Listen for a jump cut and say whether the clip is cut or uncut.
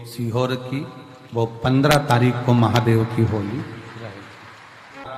uncut